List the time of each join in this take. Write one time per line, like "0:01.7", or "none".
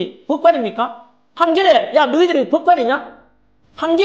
none